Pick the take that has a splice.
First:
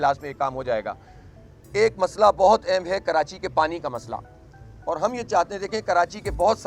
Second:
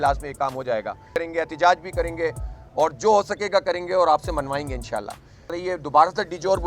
second; 2 cuts; at 1.1 s, 5.5 s

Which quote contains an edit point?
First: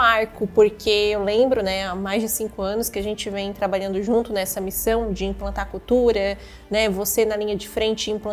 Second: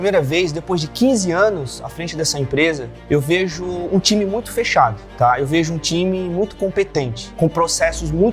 second; 3 cuts; at 2.9 s, 5.0 s, 7.2 s

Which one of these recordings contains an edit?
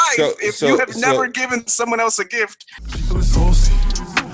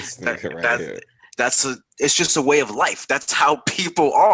first; 1 cut; at 2.6 s

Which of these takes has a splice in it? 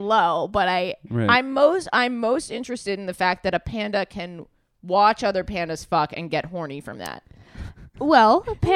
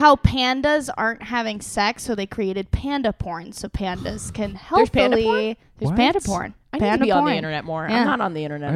first; 1 cut; at 1.3 s

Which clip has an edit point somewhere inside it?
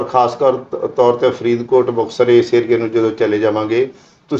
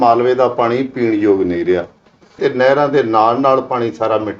second; 1 cut; at 2.4 s

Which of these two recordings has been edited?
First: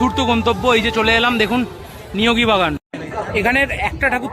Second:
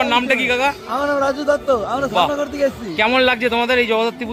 first; 1 cut; at 2.9 s

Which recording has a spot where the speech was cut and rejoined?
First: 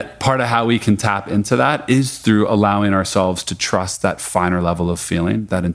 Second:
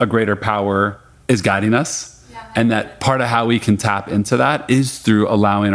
second; 1 cut; at 1.1 s

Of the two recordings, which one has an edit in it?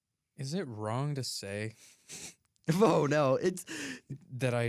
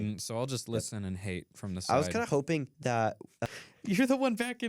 second; 1 cut; at 3.3 s

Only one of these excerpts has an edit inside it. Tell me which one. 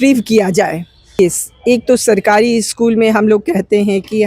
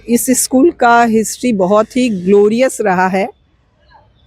first; 1 cut; at 1.1 s

